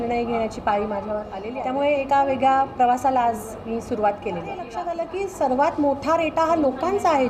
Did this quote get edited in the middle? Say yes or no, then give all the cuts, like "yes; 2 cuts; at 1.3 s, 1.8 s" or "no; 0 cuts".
yes; 2 cuts; at 1.4 s, 4.8 s